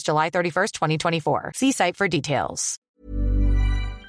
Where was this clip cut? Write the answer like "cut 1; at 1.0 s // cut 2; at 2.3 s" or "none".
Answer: cut 1; at 2.9 s